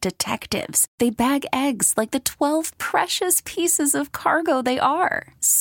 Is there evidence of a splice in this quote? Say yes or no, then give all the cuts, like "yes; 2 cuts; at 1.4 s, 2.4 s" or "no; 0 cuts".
no; 0 cuts